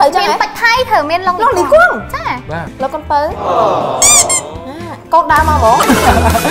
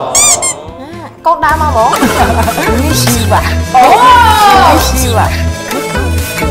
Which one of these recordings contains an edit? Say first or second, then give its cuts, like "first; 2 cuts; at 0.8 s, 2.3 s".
first; 1 cut; at 2.7 s